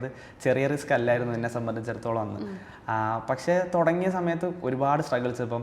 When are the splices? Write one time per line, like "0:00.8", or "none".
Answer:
none